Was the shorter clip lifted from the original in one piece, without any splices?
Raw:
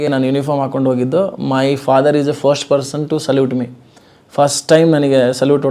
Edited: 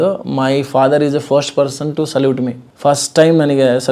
no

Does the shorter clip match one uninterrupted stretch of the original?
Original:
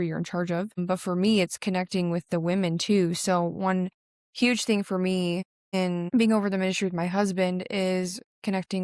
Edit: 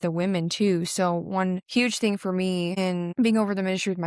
no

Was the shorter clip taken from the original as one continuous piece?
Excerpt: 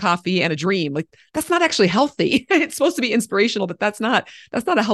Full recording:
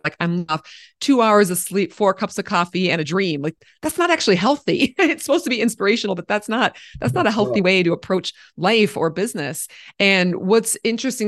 yes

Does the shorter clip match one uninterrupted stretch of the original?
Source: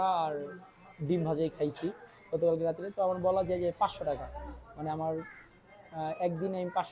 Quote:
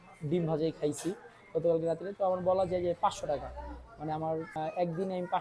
no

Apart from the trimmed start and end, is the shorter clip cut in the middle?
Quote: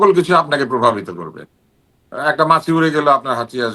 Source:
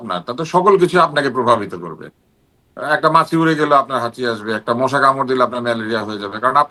no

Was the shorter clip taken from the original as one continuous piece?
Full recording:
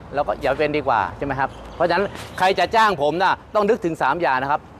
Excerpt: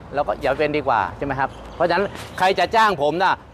yes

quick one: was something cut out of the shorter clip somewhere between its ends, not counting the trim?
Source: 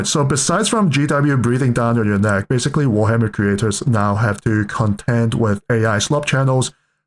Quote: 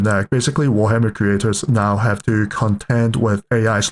no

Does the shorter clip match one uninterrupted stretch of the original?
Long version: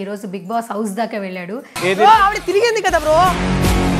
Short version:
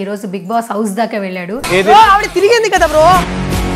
no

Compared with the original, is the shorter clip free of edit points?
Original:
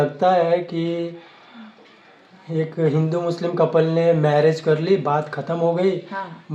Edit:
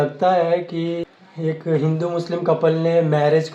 no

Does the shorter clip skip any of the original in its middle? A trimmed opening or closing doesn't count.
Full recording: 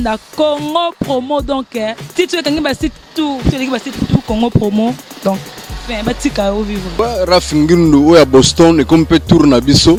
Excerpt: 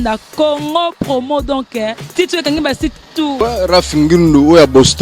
yes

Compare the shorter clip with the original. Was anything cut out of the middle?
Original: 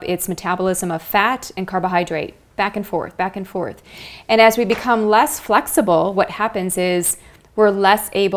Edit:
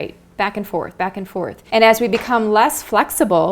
yes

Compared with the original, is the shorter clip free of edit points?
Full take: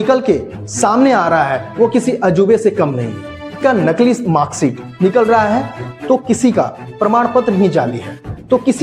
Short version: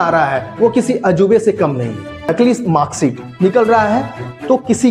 no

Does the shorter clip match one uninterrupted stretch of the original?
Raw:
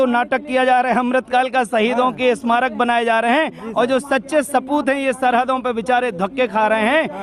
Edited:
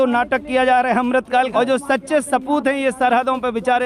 no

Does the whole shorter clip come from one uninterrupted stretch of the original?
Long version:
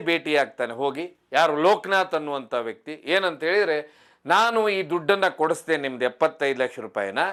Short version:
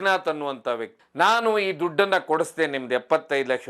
no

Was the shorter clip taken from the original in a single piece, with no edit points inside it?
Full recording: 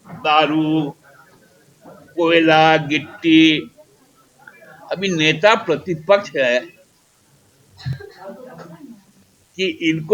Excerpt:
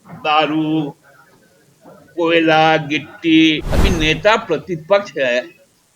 no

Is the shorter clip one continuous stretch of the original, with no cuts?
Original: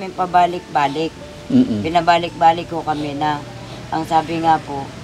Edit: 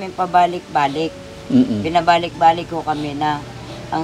yes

